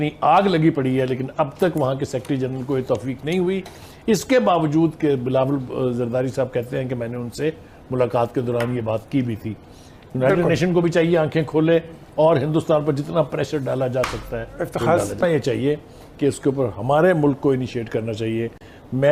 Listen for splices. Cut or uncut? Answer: uncut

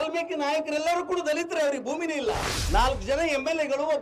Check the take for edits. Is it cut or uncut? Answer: cut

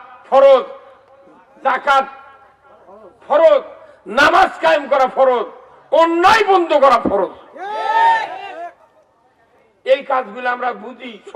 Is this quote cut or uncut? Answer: uncut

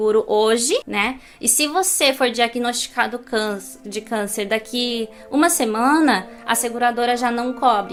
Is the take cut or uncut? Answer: uncut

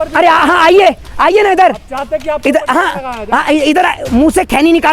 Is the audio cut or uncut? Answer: uncut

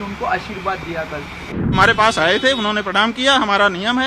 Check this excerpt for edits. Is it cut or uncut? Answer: cut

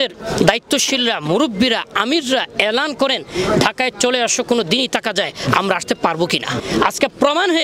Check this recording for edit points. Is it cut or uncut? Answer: cut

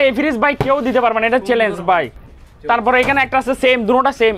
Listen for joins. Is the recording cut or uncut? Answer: uncut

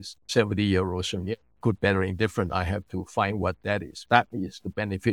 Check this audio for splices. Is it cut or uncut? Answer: cut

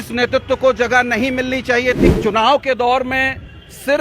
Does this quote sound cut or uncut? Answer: cut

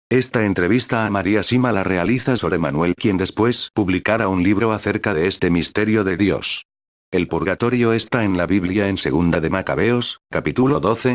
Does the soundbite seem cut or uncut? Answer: uncut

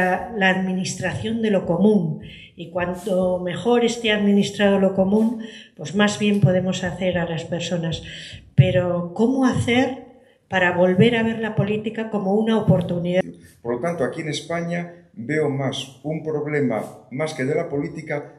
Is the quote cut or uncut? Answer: cut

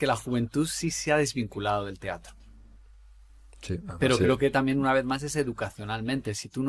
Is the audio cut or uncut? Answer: uncut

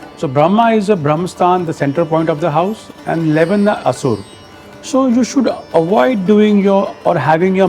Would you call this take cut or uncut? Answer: uncut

